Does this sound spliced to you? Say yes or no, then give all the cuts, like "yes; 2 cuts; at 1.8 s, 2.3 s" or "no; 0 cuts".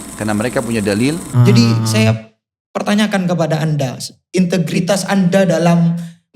yes; 1 cut; at 1.2 s